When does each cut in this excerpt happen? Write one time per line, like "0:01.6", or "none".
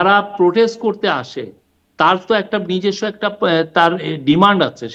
none